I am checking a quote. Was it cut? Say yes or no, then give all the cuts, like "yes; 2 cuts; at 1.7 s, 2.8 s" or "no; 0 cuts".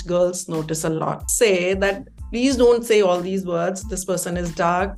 yes; 1 cut; at 1.3 s